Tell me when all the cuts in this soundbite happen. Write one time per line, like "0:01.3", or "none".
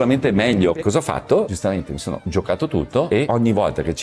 0:00.7
0:01.5
0:03.1